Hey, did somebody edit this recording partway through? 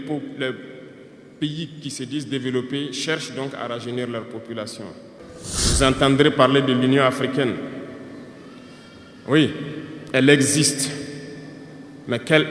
yes; 1 cut; at 5.2 s

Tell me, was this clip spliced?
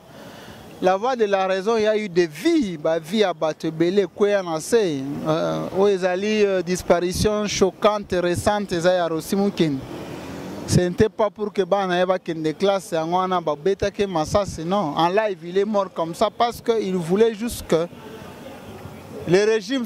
no; 0 cuts

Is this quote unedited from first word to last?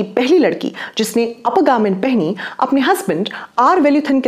yes; 0 cuts

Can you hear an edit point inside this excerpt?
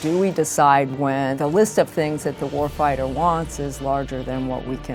no; 0 cuts

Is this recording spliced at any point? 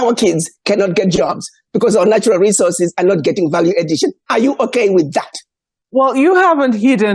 yes; 1 cut; at 5.8 s

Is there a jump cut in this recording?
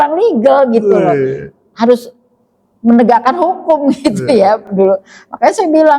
no; 0 cuts

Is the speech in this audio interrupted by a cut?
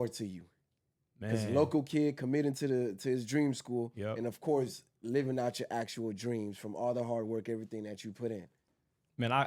yes; 1 cut; at 8.5 s

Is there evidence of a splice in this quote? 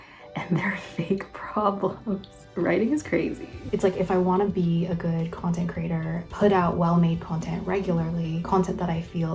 yes; 3 cuts; at 2.3 s, 3.7 s, 8.4 s

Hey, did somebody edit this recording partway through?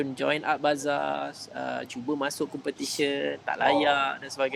no; 0 cuts

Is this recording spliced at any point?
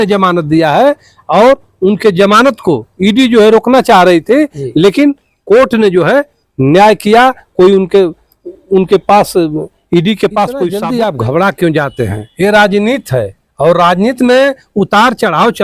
yes; 1 cut; at 10.7 s

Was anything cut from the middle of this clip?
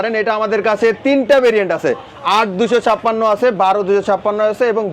no; 0 cuts

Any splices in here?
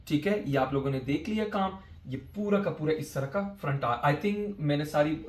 no; 0 cuts

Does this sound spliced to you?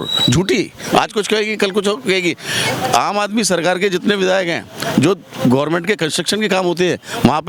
no; 0 cuts

